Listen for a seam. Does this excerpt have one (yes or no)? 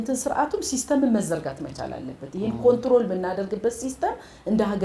no